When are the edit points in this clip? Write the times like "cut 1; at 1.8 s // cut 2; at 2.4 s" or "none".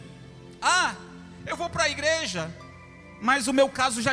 none